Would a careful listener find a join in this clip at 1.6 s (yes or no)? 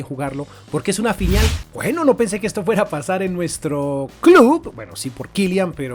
yes